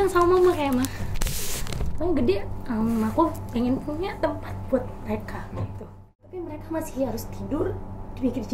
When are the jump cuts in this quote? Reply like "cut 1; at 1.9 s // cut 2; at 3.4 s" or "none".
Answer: cut 1; at 6.2 s